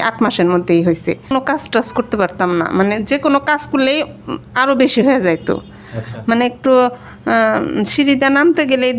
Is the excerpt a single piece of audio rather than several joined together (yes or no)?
no